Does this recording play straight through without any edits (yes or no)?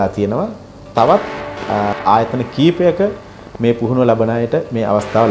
yes